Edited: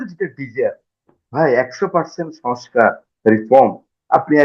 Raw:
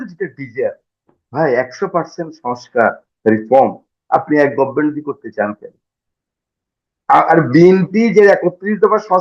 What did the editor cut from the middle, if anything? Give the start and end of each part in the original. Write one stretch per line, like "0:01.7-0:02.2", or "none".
none